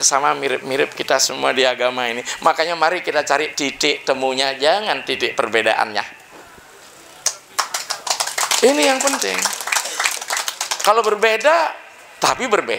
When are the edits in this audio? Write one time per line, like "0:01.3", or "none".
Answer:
none